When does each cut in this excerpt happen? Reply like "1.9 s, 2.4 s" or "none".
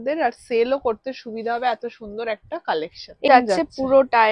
3.3 s